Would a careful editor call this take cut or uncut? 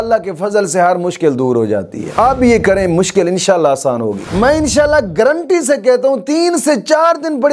cut